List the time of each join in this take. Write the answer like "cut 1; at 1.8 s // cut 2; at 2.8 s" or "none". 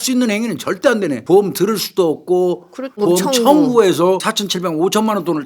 cut 1; at 1.2 s // cut 2; at 3.0 s // cut 3; at 4.3 s